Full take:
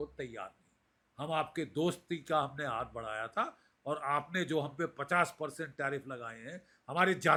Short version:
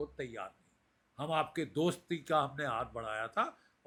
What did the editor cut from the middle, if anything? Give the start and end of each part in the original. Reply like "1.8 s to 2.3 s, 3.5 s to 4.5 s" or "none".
none